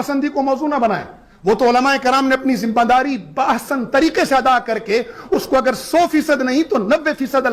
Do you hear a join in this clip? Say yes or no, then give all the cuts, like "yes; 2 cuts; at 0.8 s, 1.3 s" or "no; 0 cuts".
no; 0 cuts